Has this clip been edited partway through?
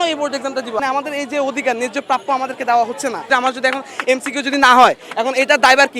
yes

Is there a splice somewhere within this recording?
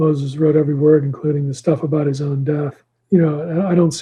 yes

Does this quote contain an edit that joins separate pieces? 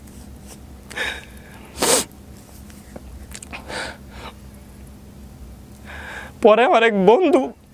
no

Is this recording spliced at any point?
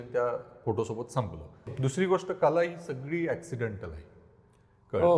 yes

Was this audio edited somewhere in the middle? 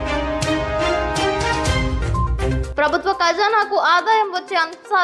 no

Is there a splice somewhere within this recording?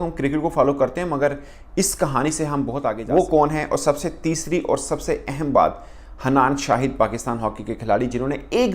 yes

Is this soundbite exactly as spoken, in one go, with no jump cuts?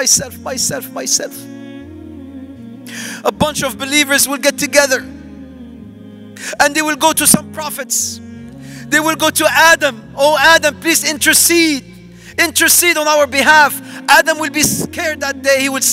no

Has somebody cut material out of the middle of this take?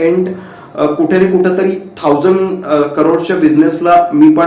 no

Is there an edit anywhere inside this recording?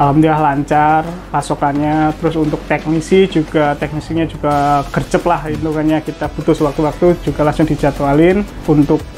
no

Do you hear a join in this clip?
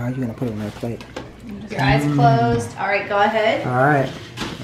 yes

